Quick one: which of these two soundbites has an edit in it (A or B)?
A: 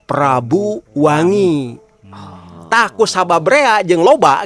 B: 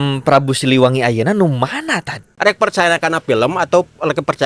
B